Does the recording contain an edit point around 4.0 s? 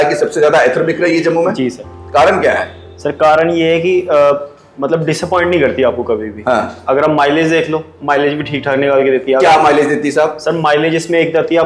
no; 0 cuts

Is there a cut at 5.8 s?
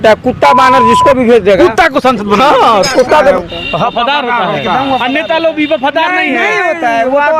no; 1 cut; at 3.2 s

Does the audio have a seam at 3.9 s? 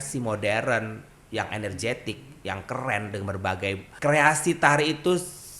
yes; 1 cut; at 3.9 s

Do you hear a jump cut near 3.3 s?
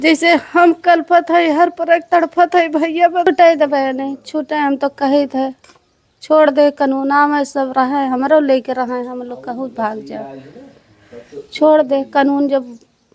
yes; 1 cut; at 3.3 s

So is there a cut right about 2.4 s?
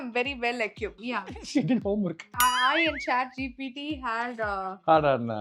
yes; 2 cuts; at 1.0 s, 2.4 s

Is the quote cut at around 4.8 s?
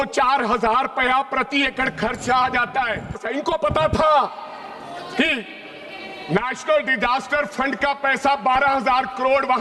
no; 1 cut; at 3.3 s

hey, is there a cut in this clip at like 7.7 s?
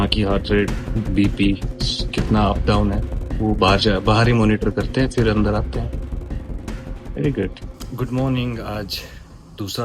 yes; 1 cut; at 7.7 s

